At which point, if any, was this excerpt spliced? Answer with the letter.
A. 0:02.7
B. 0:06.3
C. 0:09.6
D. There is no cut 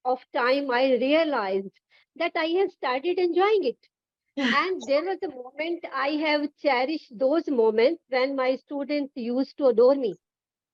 D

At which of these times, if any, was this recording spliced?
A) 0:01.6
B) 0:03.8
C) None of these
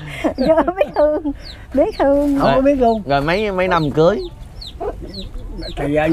C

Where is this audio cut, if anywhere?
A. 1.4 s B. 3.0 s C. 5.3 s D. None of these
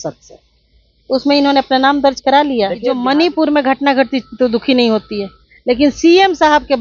B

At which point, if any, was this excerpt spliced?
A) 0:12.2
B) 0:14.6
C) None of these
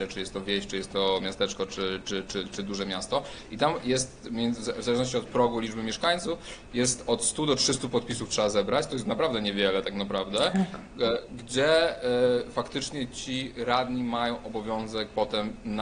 C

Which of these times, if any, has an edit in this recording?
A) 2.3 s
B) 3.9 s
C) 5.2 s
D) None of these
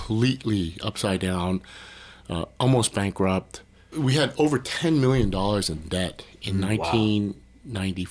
B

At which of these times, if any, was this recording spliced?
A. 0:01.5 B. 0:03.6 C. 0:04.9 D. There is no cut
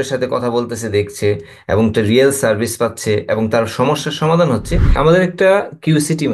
C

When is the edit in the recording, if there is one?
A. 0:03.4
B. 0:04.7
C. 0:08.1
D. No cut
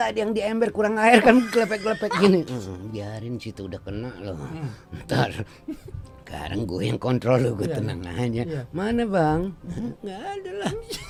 D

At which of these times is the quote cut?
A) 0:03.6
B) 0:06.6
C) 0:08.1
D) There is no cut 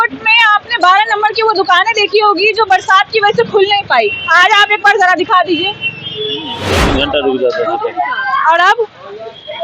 B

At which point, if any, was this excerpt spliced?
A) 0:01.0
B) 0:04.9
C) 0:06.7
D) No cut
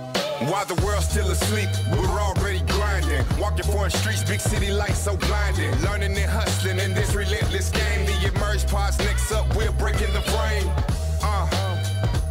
D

